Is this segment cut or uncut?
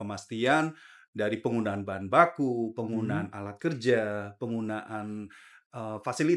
uncut